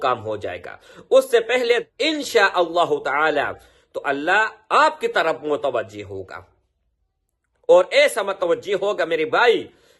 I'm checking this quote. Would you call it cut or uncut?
cut